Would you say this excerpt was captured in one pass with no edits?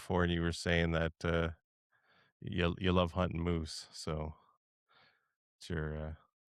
yes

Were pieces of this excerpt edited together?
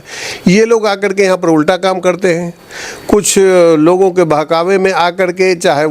no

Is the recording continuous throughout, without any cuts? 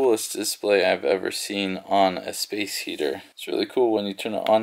yes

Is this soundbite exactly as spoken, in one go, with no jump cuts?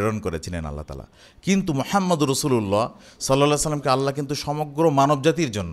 yes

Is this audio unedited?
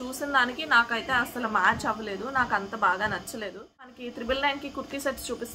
no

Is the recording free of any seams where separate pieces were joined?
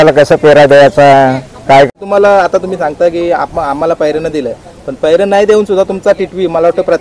no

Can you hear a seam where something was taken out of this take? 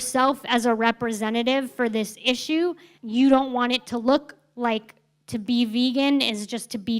yes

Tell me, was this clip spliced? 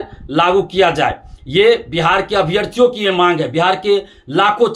no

